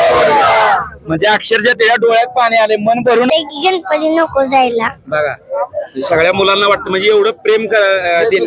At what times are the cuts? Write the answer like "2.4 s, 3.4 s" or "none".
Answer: 3.3 s